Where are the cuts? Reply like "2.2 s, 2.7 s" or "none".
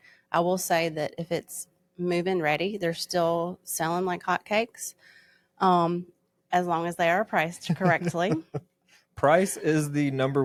none